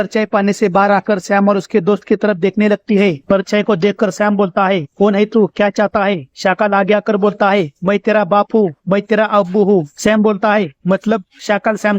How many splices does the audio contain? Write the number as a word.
two